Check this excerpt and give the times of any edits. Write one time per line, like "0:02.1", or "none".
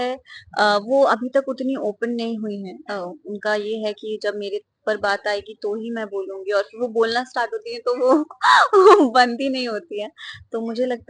none